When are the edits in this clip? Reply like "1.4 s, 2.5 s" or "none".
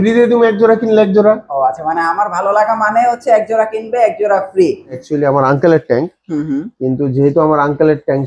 5.0 s

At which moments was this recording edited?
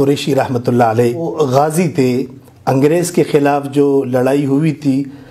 1.3 s

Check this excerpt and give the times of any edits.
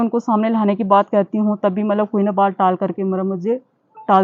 none

